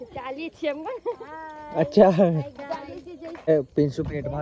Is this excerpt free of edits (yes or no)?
no